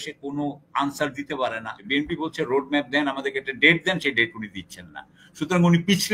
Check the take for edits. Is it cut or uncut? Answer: cut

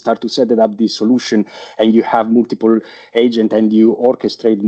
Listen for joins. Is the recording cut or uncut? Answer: uncut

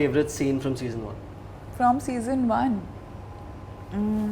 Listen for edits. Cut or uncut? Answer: uncut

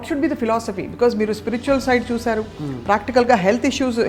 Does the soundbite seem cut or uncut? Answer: uncut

